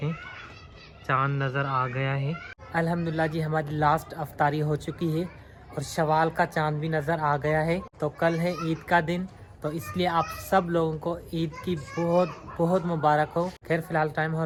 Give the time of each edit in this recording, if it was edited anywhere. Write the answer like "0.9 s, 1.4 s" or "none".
none